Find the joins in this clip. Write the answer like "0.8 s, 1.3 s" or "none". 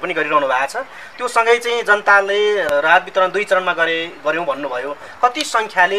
2.7 s